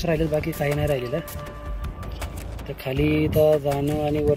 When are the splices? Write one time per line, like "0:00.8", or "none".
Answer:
0:01.2
0:02.7